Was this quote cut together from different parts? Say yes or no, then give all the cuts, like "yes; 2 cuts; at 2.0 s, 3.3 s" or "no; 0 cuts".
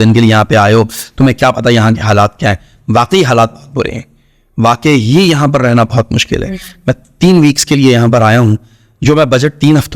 no; 0 cuts